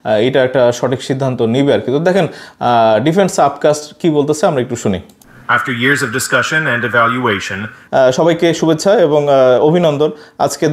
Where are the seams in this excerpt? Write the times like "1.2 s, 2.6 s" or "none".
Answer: 7.8 s

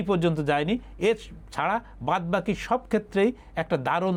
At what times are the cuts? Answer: none

